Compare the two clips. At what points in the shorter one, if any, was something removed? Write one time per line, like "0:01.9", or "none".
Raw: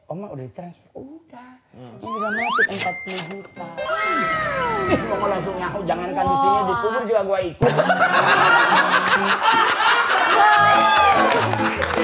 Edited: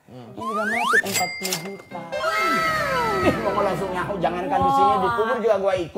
none